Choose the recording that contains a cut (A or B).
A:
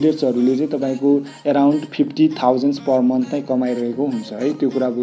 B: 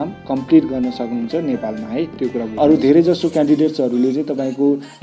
B